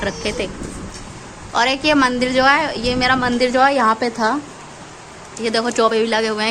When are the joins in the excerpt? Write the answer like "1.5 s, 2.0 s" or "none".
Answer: 0.9 s